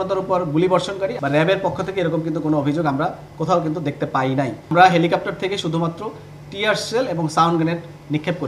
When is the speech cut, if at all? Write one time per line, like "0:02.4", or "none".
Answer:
0:01.1
0:04.7